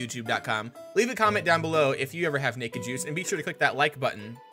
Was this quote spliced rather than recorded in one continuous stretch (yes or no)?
no